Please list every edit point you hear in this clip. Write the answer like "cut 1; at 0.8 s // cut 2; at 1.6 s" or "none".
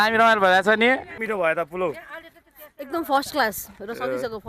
cut 1; at 1.2 s